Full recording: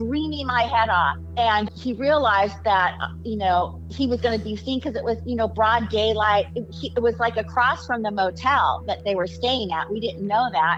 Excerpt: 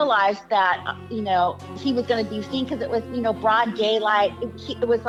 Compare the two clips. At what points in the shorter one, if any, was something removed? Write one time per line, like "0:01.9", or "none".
none